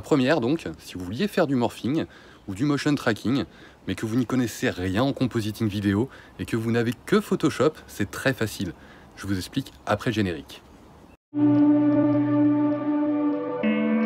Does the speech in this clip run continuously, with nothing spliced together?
no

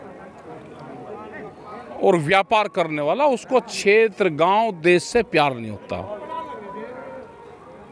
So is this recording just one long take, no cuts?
yes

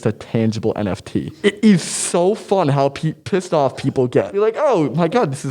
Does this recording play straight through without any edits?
no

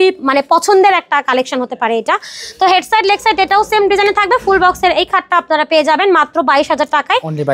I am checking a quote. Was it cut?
no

